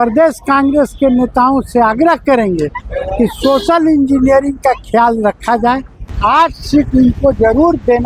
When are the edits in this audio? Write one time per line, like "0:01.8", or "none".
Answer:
0:06.4